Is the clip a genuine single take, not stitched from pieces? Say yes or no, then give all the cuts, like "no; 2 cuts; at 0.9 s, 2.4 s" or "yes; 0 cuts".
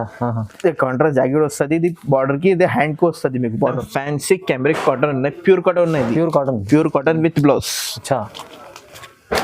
no; 1 cut; at 3.8 s